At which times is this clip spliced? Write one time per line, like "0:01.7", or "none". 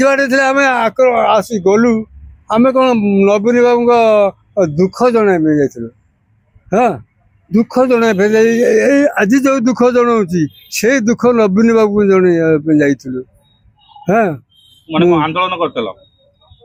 none